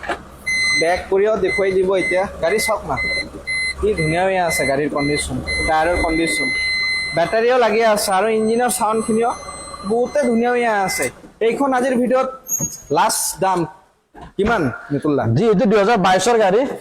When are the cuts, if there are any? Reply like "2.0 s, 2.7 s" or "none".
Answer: none